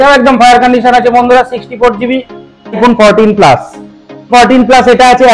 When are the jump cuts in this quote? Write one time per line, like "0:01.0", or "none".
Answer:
0:02.8
0:04.3

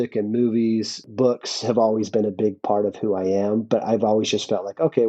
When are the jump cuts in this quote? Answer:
0:01.1

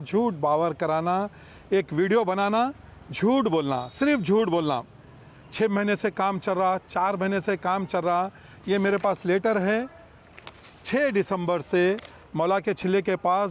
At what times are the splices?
none

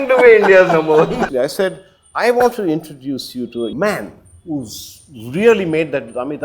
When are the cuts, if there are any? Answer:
0:01.3
0:03.7

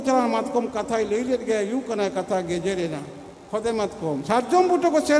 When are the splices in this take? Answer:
0:04.2

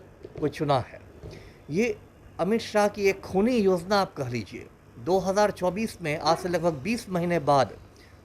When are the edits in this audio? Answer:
none

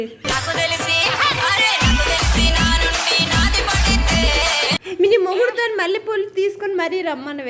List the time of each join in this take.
0:04.9

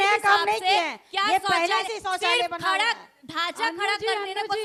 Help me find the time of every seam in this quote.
none

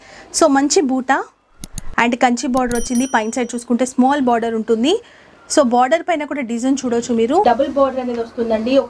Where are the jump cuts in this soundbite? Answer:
0:07.4

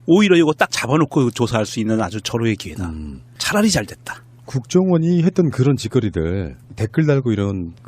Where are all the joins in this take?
0:06.3

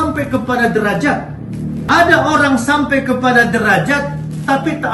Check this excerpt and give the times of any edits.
0:01.8

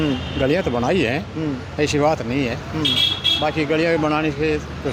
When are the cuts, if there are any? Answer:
none

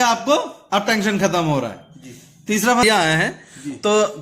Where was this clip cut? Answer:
0:02.8

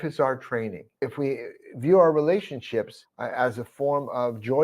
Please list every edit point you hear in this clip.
0:00.9

